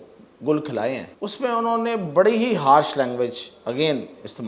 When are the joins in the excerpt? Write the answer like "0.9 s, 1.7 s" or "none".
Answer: 1.2 s